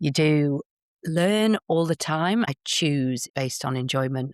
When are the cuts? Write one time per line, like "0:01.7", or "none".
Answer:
0:02.6
0:03.3